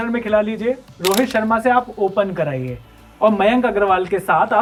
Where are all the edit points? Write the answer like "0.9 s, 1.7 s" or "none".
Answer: none